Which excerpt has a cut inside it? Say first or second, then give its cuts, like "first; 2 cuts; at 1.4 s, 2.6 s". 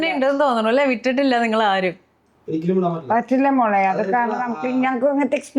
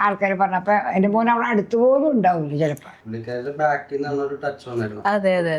second; 1 cut; at 3.0 s